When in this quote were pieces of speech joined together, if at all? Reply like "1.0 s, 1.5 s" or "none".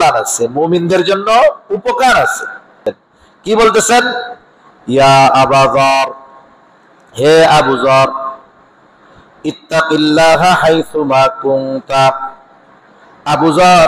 2.8 s